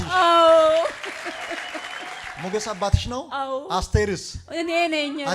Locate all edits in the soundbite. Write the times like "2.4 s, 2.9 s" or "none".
2.3 s